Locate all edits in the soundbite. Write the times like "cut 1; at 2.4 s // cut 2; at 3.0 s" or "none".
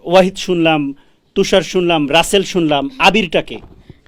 none